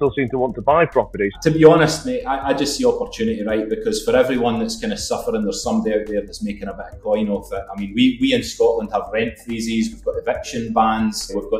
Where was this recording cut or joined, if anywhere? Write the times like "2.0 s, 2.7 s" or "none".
1.4 s